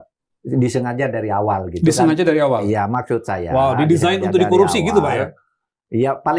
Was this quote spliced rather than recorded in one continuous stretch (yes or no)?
no